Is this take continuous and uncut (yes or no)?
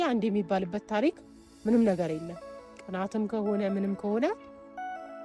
yes